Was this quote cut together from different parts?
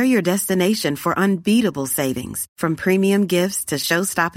no; 0 cuts

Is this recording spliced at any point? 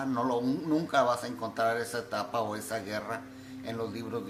no; 0 cuts

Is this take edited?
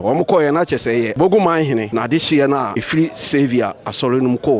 yes; 3 cuts; at 1.1 s, 1.9 s, 2.8 s

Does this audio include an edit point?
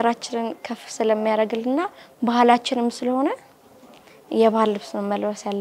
no; 0 cuts

